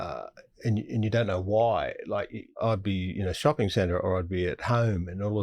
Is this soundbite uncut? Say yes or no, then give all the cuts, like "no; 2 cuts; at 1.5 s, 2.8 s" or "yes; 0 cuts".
no; 1 cut; at 2.6 s